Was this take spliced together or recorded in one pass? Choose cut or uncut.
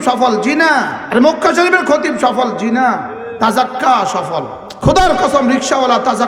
cut